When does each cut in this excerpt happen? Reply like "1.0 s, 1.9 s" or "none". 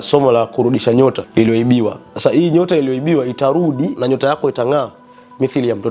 1.2 s, 3.9 s